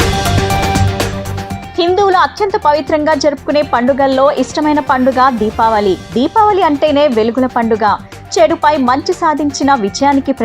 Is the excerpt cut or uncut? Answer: cut